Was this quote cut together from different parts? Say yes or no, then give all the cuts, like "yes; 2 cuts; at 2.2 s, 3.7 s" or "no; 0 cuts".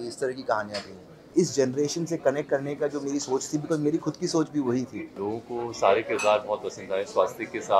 yes; 2 cuts; at 1.3 s, 5.1 s